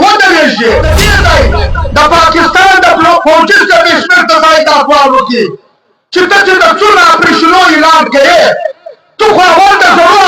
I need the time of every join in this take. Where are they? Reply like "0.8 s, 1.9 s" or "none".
1.0 s